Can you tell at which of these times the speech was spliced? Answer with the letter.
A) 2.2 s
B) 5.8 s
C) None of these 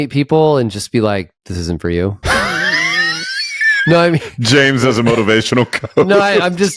A